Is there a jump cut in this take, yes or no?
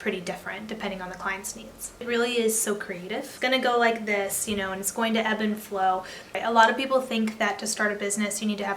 yes